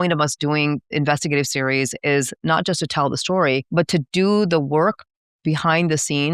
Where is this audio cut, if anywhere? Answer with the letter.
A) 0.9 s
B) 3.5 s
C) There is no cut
A